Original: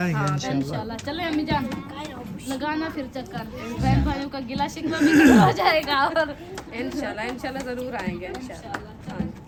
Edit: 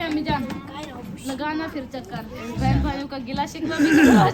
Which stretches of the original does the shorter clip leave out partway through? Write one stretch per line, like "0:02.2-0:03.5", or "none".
none